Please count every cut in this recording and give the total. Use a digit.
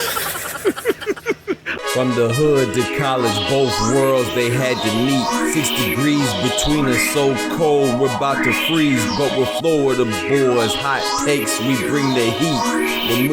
1